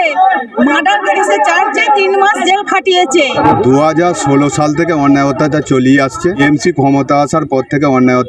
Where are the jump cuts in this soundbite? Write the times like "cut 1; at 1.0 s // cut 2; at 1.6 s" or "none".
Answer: cut 1; at 3.3 s // cut 2; at 6.4 s